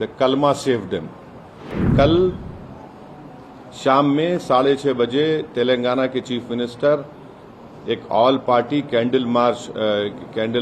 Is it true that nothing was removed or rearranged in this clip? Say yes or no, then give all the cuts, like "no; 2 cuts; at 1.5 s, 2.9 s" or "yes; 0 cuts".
no; 1 cut; at 1.8 s